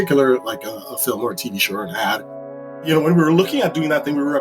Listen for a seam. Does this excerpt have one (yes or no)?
yes